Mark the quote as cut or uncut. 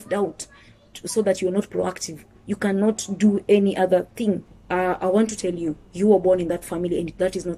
cut